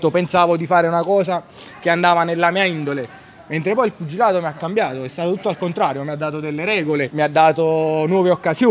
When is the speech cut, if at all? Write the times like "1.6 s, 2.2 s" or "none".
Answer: none